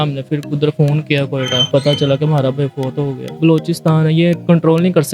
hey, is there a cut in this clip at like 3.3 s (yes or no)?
yes